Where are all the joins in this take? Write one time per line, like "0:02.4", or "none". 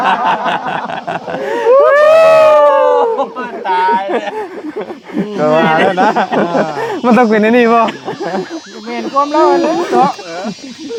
none